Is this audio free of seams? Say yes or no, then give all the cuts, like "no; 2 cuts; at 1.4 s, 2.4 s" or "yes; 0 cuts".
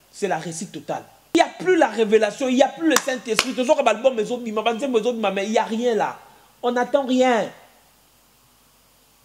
no; 1 cut; at 1.4 s